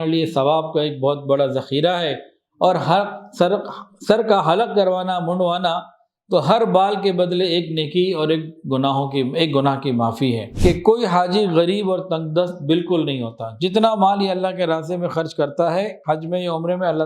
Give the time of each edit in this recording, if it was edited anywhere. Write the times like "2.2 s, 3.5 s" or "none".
10.5 s